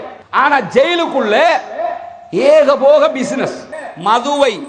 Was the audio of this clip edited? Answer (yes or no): yes